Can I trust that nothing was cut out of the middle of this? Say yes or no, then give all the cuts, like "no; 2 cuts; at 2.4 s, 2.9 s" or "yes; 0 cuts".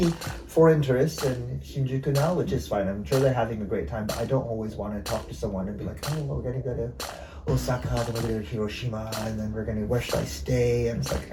yes; 0 cuts